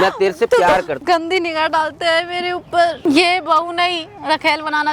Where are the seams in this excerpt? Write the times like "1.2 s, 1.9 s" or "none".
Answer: 0.9 s, 3.0 s